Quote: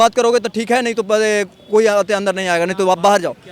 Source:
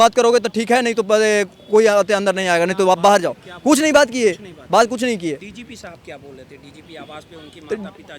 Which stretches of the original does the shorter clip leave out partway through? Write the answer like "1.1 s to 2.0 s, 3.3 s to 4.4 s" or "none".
none